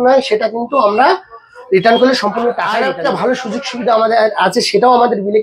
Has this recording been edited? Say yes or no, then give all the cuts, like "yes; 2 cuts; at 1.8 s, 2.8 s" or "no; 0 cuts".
yes; 1 cut; at 2.8 s